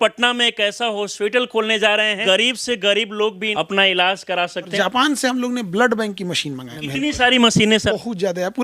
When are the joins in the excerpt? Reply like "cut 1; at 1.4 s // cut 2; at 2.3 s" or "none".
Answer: cut 1; at 1.1 s // cut 2; at 2.2 s // cut 3; at 3.4 s // cut 4; at 4.7 s // cut 5; at 6.7 s // cut 6; at 7.9 s

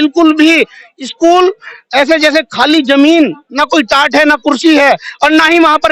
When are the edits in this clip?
none

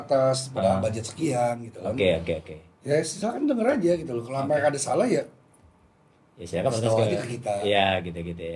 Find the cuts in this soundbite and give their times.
none

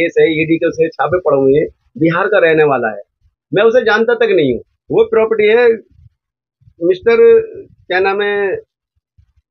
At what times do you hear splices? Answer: cut 1; at 4.7 s

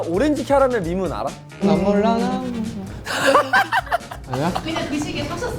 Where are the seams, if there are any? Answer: cut 1; at 1.6 s

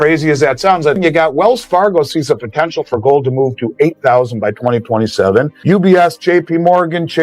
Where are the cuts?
cut 1; at 1.0 s // cut 2; at 5.5 s

